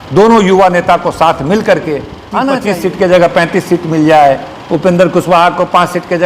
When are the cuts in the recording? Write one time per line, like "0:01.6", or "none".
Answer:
0:02.6